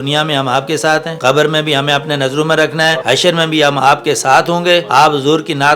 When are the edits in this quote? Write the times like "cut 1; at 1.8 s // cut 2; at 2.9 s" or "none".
cut 1; at 1.1 s // cut 2; at 3.0 s // cut 3; at 4.9 s